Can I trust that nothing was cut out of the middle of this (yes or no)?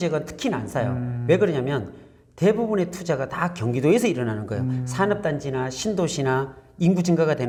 yes